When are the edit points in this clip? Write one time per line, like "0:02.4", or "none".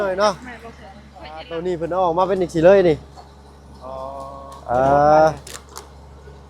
0:01.5